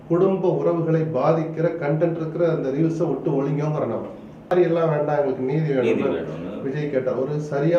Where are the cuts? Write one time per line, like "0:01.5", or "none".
0:04.5